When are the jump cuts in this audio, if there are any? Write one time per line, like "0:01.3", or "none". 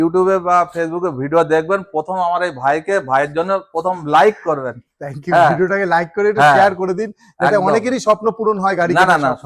none